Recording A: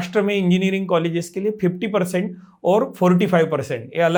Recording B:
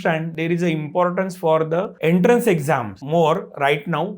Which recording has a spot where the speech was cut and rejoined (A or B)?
B